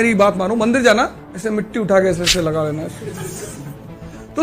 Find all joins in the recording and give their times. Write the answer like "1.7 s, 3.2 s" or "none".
1.2 s